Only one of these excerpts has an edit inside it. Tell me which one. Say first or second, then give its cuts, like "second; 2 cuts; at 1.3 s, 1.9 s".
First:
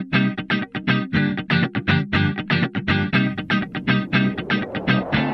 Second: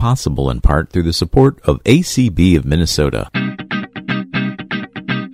second; 1 cut; at 3.3 s